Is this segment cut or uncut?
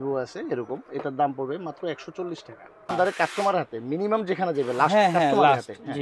cut